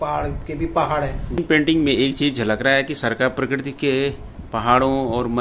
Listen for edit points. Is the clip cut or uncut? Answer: cut